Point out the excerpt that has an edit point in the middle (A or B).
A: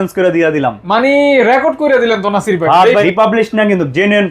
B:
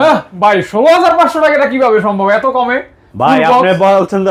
A